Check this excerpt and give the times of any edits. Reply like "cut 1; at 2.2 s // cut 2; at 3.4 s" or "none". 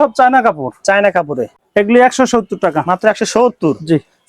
cut 1; at 1.5 s